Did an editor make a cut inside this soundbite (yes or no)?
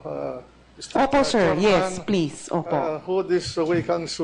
no